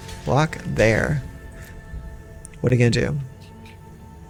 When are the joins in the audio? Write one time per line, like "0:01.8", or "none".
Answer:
none